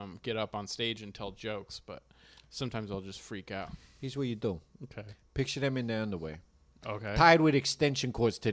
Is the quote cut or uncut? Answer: cut